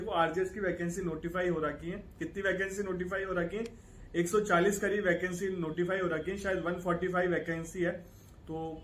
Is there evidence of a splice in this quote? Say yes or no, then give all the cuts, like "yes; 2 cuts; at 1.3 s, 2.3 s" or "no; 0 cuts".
no; 0 cuts